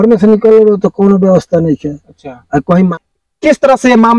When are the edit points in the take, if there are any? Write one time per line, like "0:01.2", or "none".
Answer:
0:02.9